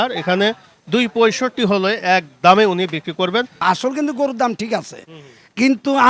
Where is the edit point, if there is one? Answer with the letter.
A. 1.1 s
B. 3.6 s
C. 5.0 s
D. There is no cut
B